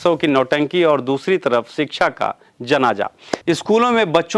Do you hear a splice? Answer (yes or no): yes